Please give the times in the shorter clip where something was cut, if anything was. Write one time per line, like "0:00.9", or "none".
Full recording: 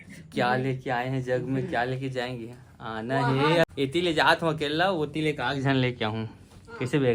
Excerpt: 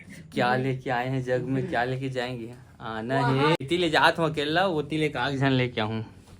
0:03.6

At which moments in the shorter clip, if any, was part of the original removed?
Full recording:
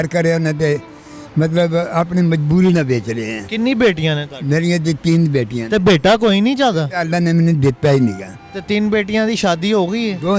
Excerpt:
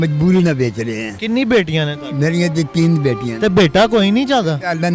none

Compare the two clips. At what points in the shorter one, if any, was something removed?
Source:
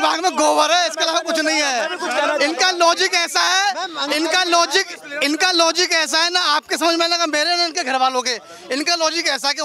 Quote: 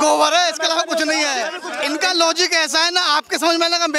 0:01.7

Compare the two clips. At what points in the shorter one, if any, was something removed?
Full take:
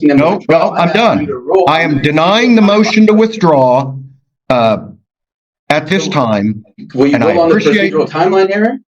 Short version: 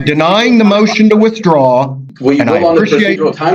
0:02.0

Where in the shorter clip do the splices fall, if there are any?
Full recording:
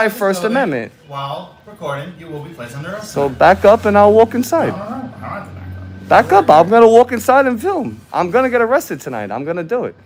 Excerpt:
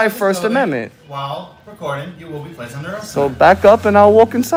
none

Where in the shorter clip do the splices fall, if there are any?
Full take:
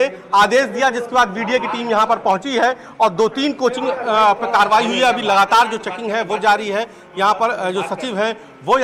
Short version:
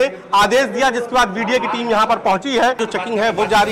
0:02.8

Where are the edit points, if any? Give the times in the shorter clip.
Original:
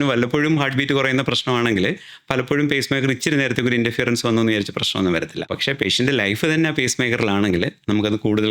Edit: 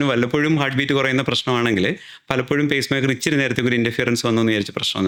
none

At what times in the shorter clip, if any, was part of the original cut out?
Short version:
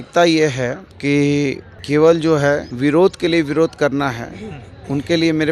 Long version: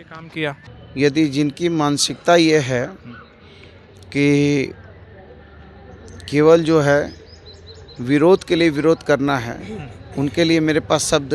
0:00.9
0:01.7
0:02.7

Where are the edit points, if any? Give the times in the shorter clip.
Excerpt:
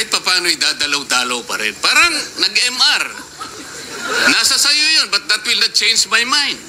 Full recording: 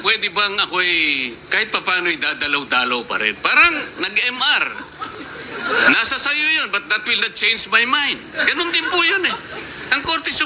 none

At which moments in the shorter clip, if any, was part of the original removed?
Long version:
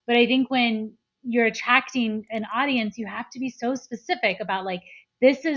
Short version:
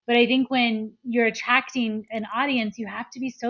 0:01.0

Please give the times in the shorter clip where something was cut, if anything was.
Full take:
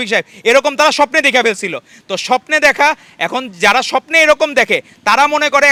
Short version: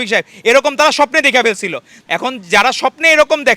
0:02.0

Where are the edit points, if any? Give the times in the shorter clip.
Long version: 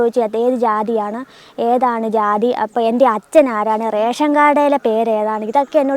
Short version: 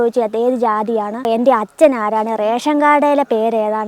0:01.2

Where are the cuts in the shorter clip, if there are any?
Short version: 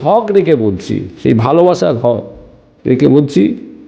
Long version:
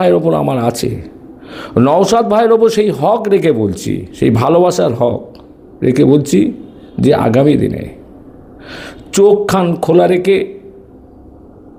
none

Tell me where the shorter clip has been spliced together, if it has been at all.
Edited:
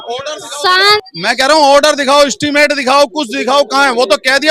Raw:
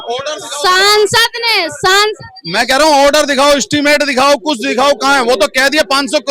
0:01.0

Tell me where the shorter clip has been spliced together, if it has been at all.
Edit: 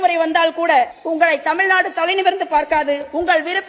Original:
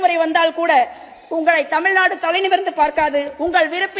0:01.0

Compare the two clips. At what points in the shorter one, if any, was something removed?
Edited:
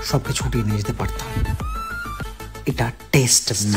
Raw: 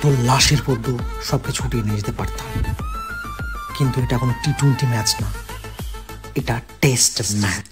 0:02.3

